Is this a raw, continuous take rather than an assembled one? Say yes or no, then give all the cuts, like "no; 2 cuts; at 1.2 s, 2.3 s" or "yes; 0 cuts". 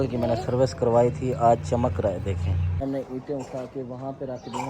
no; 1 cut; at 2.8 s